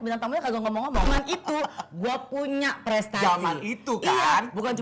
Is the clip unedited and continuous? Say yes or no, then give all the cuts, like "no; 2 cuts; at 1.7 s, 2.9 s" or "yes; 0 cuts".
no; 1 cut; at 1.1 s